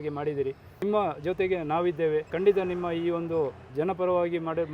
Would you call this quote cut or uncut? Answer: cut